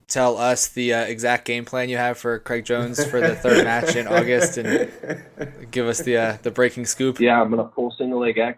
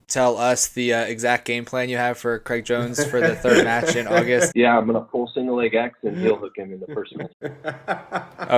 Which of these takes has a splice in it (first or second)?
second